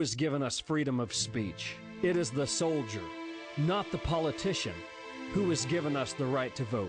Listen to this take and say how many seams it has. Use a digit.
0